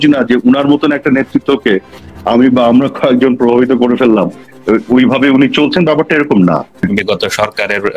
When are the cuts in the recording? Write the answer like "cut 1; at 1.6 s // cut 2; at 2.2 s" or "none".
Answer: cut 1; at 6.8 s